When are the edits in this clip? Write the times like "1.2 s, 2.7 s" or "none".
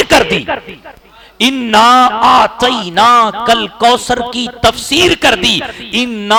none